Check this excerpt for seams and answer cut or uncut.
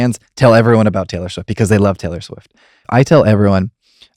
cut